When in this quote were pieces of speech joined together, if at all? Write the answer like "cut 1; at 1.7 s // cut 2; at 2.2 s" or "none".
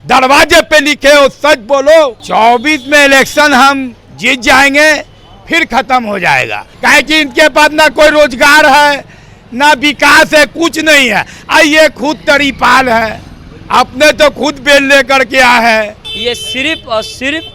cut 1; at 2.2 s // cut 2; at 6.6 s // cut 3; at 16.0 s